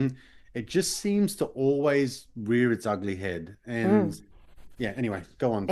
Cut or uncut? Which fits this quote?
uncut